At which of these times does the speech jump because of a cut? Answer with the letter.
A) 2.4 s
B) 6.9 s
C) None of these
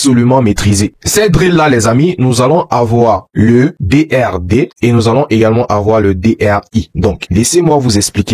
B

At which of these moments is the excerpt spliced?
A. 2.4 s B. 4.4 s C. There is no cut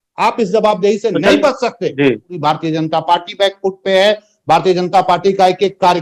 A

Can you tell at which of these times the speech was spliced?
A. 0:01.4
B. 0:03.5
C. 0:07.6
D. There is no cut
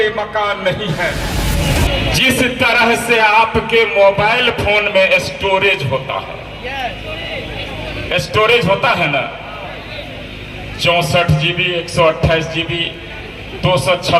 A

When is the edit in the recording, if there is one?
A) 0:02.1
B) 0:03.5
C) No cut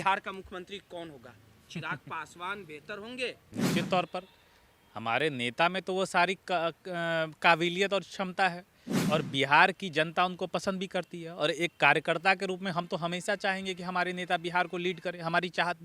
B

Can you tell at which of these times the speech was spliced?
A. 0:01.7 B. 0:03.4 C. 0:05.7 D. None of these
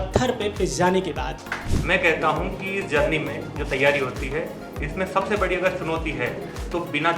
A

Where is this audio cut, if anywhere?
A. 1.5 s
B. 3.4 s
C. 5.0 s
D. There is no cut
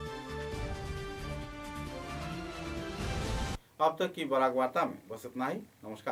D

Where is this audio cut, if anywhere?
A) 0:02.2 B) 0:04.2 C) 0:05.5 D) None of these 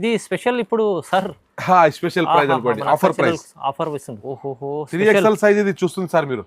B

